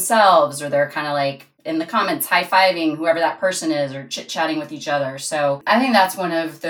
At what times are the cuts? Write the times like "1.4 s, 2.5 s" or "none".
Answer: 5.6 s